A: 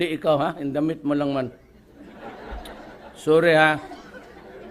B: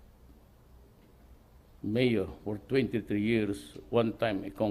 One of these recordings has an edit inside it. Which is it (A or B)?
A